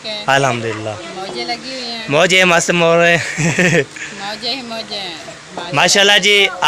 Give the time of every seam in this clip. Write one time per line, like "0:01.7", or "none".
none